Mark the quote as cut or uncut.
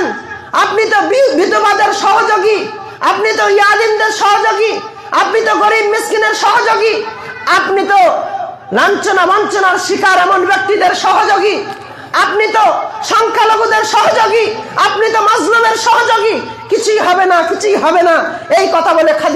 uncut